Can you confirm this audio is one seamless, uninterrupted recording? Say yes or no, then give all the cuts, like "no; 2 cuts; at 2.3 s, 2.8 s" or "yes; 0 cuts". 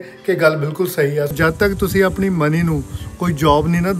no; 1 cut; at 1.3 s